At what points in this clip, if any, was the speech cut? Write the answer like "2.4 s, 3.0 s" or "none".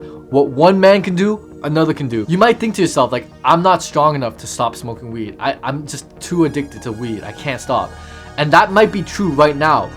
2.2 s